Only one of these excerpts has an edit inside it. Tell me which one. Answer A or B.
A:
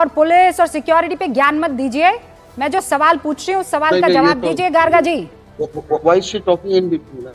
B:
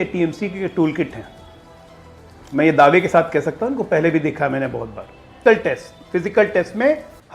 B